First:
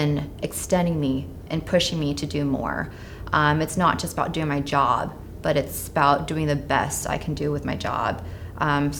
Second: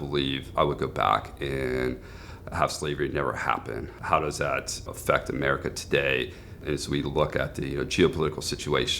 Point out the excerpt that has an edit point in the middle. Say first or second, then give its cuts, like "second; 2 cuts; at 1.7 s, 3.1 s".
second; 3 cuts; at 3.9 s, 4.8 s, 6.5 s